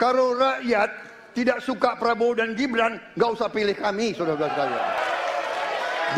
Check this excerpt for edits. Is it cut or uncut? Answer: cut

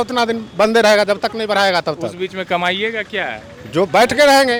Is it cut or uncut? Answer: uncut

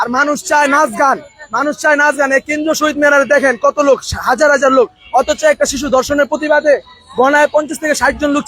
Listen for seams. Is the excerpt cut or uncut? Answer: uncut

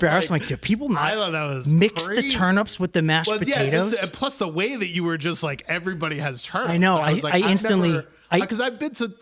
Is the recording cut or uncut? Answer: uncut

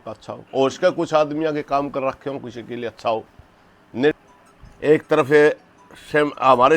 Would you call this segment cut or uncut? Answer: cut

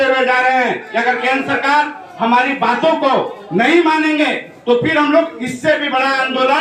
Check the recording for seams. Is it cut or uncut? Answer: uncut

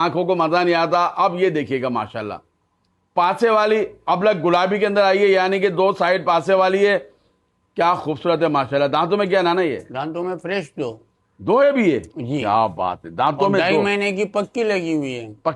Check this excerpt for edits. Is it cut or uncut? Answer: uncut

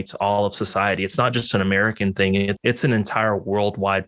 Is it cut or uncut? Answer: cut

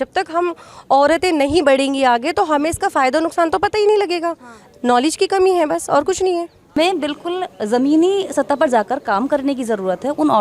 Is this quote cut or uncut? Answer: cut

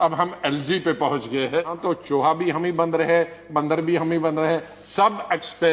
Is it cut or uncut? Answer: cut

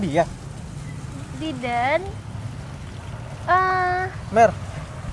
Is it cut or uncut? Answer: uncut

